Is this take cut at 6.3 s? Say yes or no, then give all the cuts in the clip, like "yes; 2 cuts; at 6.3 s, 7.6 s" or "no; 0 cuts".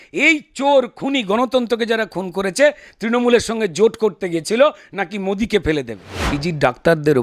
yes; 1 cut; at 6.3 s